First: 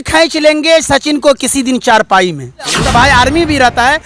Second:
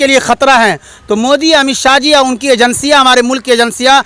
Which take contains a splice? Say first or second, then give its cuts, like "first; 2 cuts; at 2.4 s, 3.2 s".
first; 1 cut; at 2.8 s